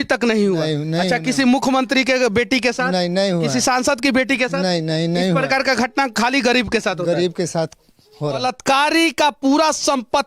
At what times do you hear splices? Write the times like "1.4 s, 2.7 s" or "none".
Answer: 8.4 s

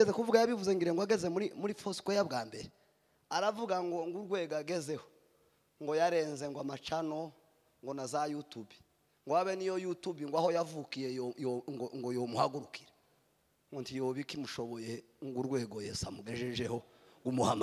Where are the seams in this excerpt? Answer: none

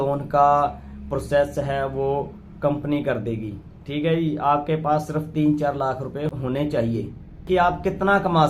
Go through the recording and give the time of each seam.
6.4 s, 7.4 s

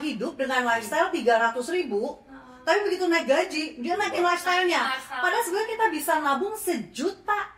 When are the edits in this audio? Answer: none

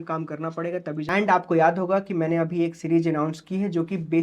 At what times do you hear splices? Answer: 1.2 s

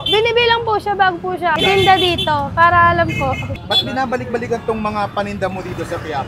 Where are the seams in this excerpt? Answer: 1.5 s, 3.5 s

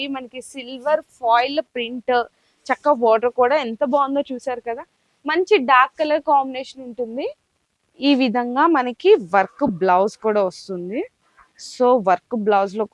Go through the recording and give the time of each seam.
none

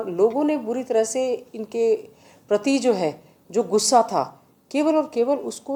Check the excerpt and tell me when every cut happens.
none

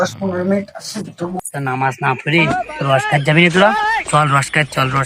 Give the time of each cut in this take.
1.4 s

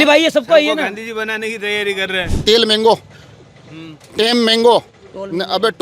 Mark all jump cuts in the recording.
2.4 s

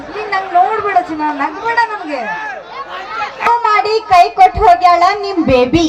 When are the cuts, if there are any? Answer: 3.5 s

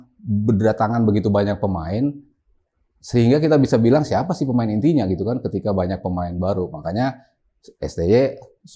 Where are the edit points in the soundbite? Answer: none

